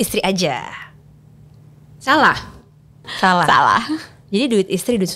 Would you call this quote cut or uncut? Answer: cut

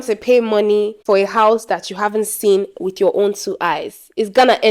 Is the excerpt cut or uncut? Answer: cut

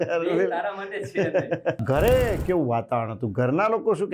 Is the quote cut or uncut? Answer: cut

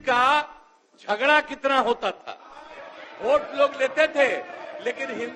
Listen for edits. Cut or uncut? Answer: uncut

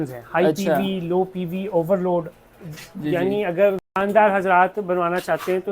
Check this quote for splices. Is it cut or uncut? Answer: cut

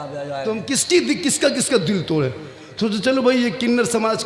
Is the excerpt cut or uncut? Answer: uncut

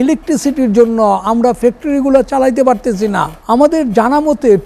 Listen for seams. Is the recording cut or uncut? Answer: cut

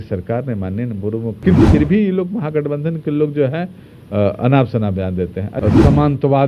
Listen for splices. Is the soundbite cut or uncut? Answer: cut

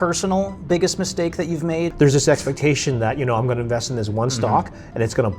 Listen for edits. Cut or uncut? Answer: cut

